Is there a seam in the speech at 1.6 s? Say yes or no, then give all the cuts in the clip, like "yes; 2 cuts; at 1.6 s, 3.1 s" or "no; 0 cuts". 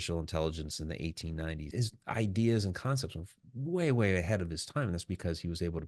yes; 1 cut; at 1.6 s